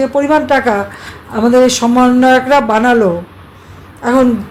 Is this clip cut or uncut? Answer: uncut